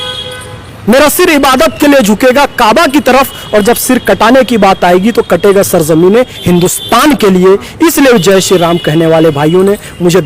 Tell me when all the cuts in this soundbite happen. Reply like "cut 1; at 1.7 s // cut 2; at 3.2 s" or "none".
none